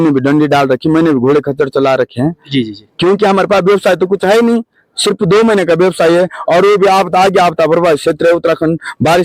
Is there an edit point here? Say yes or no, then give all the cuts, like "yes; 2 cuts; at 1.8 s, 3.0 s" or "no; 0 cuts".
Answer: no; 0 cuts